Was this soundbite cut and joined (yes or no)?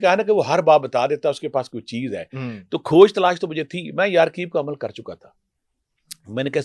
no